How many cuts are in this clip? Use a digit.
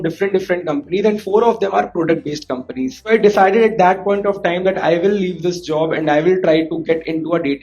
1